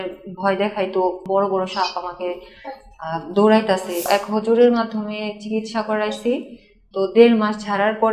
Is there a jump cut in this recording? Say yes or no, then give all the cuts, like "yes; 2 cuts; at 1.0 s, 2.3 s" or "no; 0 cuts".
yes; 2 cuts; at 1.2 s, 4.1 s